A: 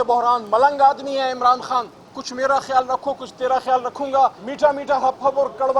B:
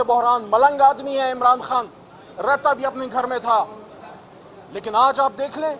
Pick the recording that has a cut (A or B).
A